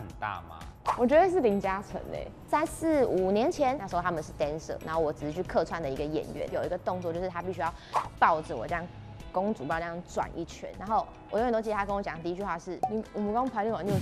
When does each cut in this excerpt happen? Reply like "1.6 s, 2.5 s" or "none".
3.8 s, 10.7 s, 12.7 s